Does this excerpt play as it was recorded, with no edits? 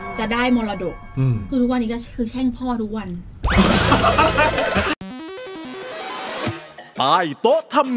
no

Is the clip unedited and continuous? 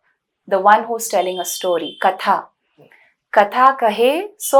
yes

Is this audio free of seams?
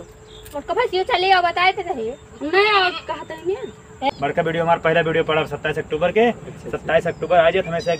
no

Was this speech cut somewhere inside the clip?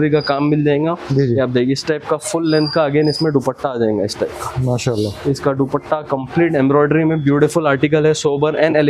no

